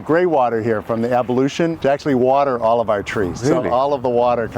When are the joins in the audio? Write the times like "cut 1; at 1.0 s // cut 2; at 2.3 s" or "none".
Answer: cut 1; at 1.7 s // cut 2; at 3.3 s